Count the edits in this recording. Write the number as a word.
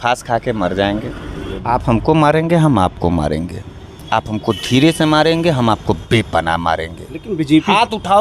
one